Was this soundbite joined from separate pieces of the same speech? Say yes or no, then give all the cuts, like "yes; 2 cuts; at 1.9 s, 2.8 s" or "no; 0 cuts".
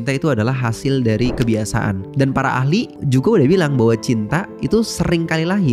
yes; 2 cuts; at 2.1 s, 3.0 s